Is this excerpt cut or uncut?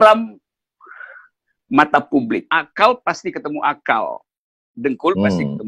cut